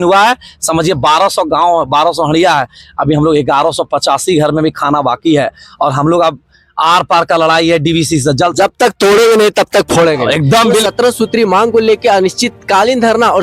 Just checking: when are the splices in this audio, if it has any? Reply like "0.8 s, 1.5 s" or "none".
10.8 s